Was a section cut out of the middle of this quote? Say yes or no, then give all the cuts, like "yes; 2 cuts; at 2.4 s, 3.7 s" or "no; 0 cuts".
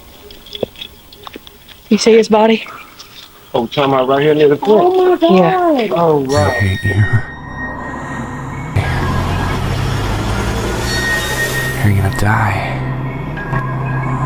yes; 1 cut; at 6.7 s